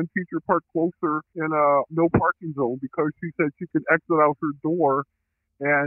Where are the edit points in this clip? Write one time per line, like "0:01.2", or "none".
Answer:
0:01.3